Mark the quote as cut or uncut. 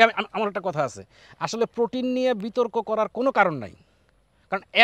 uncut